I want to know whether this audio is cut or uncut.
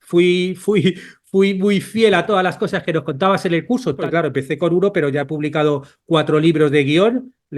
cut